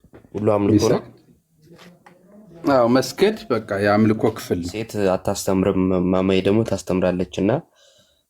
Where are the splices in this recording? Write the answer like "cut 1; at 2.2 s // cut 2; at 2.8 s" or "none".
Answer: cut 1; at 4.8 s